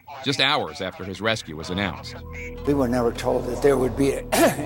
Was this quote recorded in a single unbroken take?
no; 1 cut; at 3.3 s

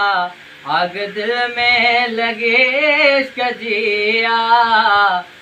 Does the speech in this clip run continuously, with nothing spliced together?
yes; 0 cuts

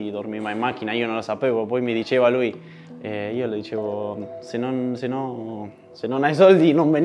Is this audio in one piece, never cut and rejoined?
yes; 0 cuts

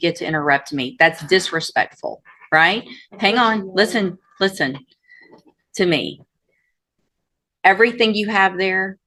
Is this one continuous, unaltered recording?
yes; 0 cuts

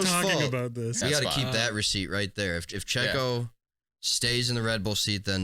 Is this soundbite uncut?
no; 1 cut; at 1.0 s

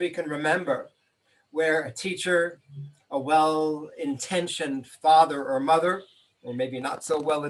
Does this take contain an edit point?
no; 0 cuts

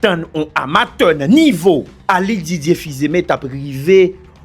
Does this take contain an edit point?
yes; 1 cut; at 1.9 s

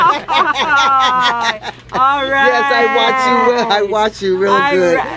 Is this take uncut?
yes; 0 cuts

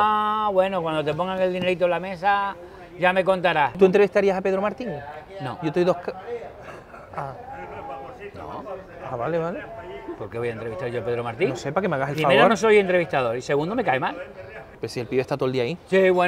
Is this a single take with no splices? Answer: no; 2 cuts; at 3.7 s, 14.8 s

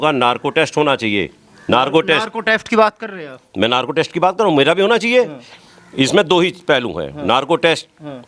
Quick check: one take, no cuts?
yes; 0 cuts

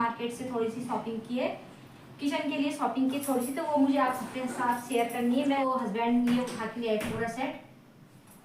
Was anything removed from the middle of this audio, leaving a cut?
yes; 1 cut; at 5.6 s

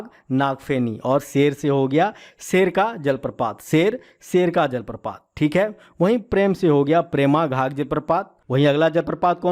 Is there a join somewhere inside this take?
yes; 1 cut; at 8.4 s

